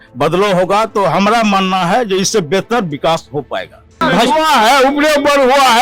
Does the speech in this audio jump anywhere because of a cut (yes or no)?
yes